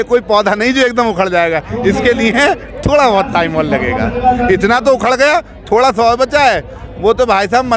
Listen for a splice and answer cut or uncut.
uncut